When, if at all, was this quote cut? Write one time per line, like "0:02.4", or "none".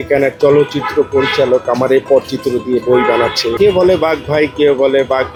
none